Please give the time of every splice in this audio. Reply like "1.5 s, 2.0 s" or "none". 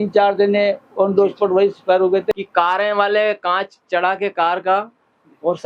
2.3 s